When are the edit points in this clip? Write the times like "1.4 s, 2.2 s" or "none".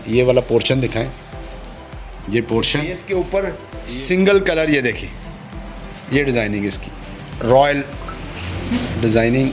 3.0 s